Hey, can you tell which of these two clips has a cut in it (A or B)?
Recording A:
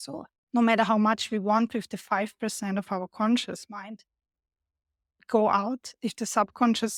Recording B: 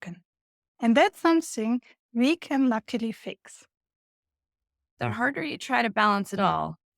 B